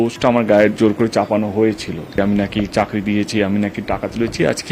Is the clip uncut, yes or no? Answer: no